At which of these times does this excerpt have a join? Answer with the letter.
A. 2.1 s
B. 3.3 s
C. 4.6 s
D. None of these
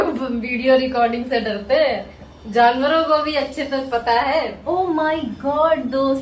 C